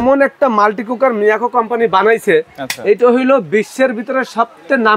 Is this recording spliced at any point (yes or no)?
no